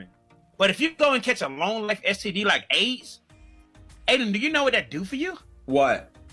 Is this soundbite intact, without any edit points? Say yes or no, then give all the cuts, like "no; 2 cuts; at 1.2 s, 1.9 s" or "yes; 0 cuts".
yes; 0 cuts